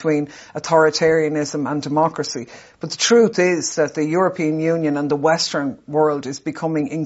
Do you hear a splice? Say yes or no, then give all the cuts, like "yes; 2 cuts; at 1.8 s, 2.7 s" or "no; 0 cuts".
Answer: no; 0 cuts